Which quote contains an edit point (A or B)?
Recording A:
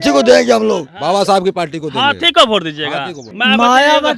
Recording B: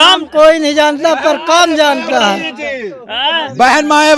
A